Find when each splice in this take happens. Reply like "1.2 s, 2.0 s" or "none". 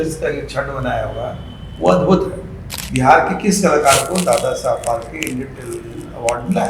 2.6 s